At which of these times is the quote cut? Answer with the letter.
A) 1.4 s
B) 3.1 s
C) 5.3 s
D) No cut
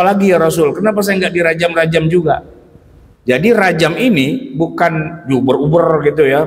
D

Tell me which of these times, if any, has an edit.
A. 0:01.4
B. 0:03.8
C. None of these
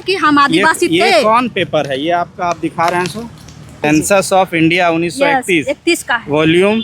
B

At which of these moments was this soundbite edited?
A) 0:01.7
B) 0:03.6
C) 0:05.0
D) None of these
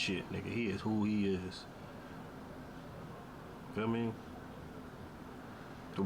D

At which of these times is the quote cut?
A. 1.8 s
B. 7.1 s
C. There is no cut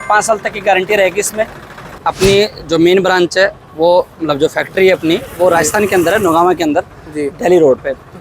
A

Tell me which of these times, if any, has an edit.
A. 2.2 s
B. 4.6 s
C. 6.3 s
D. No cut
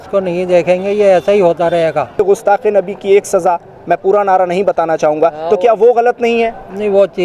A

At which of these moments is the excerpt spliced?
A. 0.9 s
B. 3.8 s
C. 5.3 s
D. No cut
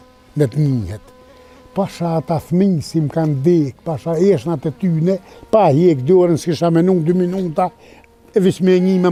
D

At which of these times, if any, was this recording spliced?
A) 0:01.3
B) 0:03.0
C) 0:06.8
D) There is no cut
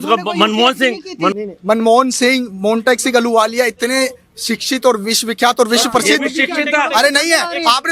A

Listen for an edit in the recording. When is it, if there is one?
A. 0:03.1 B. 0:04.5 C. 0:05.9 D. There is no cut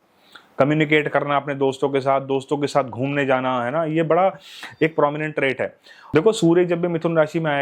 C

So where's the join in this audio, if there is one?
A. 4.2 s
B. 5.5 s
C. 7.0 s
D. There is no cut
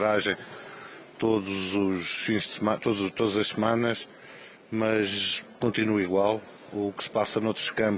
D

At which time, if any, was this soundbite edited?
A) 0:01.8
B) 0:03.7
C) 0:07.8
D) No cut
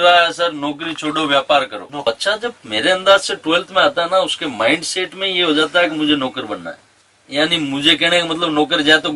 A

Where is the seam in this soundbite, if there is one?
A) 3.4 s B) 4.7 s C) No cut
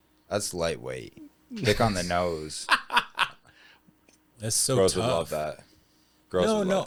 C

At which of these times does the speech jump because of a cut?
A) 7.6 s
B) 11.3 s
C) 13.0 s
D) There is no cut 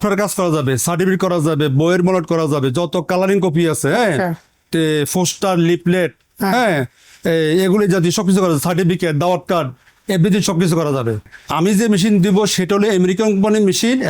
D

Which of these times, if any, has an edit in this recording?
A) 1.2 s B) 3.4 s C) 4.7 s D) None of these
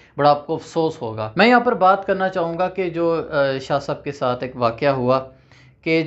A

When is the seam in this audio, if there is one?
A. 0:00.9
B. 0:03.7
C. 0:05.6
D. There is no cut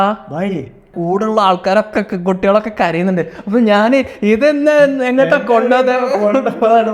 A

